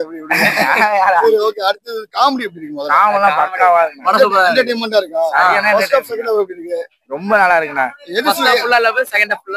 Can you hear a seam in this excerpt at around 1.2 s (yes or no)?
no